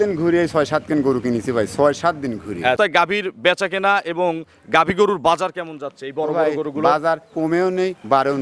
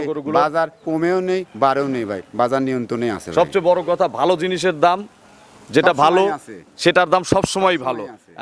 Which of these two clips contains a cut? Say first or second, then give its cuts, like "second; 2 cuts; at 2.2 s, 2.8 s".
first; 1 cut; at 2.8 s